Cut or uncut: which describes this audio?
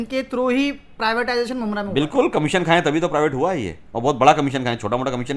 uncut